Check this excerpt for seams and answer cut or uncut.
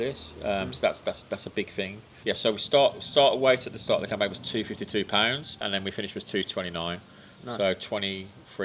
cut